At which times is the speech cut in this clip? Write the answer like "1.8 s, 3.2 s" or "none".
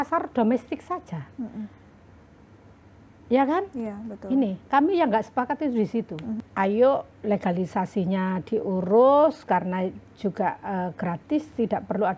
6.4 s